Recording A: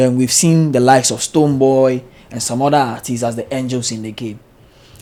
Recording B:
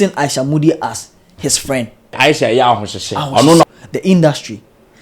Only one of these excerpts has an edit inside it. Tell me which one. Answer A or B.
B